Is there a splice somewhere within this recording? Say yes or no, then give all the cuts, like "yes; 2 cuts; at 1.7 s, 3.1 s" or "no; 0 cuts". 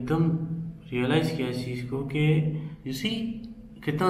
yes; 1 cut; at 2.7 s